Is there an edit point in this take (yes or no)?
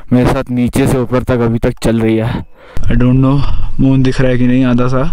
yes